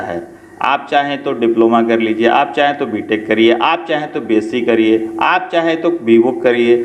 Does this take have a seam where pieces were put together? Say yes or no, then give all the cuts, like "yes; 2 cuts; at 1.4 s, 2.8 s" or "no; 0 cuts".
no; 0 cuts